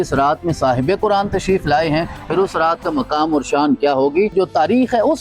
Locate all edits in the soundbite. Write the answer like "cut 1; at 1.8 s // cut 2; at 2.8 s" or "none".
cut 1; at 4.3 s

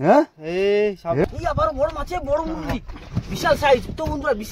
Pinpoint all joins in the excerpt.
cut 1; at 1.2 s

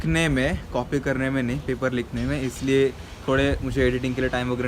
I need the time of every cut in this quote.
none

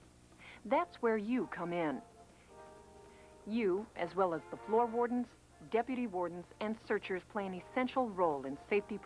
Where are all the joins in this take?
none

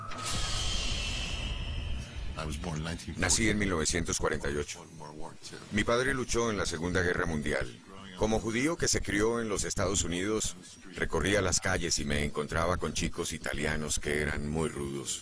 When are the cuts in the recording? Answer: cut 1; at 14.2 s

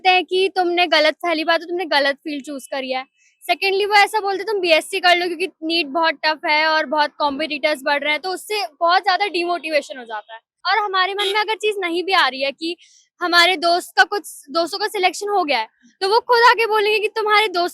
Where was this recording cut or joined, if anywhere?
cut 1; at 10.6 s

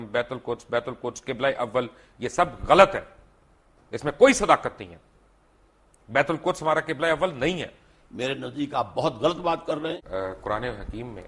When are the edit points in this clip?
cut 1; at 10.0 s

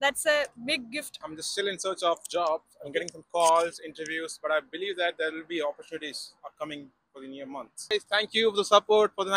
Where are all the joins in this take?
cut 1; at 1.3 s // cut 2; at 7.9 s

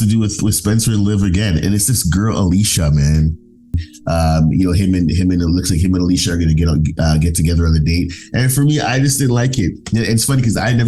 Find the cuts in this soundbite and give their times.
cut 1; at 3.9 s

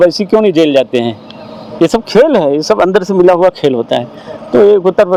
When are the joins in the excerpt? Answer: none

